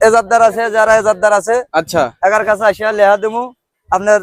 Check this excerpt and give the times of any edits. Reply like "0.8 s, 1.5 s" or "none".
none